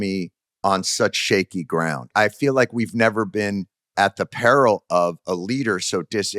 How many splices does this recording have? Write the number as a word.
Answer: two